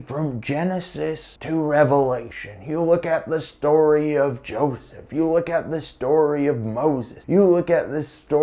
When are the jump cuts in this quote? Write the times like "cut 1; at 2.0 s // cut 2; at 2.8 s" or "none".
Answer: cut 1; at 1.3 s // cut 2; at 7.1 s